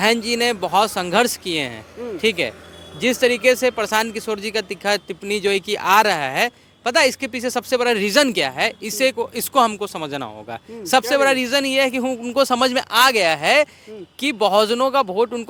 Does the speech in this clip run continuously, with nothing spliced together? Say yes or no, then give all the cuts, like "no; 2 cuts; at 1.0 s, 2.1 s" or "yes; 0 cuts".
yes; 0 cuts